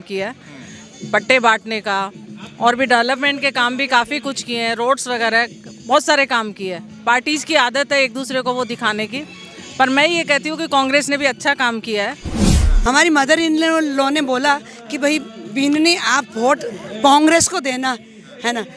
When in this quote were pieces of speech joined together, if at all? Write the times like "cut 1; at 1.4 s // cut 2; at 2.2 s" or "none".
cut 1; at 12.4 s